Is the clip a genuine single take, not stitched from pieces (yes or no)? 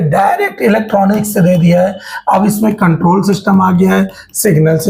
yes